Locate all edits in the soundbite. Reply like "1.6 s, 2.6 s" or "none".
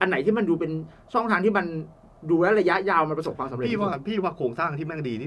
none